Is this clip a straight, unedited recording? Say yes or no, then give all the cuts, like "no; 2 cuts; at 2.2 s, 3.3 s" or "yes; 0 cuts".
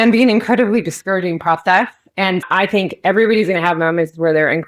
no; 1 cut; at 2.4 s